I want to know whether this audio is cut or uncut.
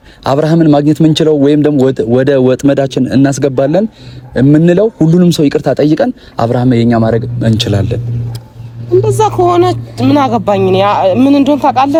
uncut